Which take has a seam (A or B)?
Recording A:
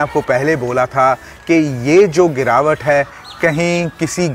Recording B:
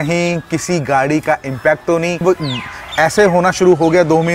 B